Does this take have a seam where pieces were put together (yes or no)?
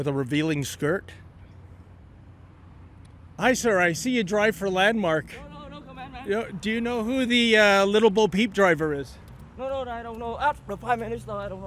yes